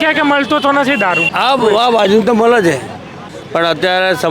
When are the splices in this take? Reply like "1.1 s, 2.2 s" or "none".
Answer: 1.2 s, 3.3 s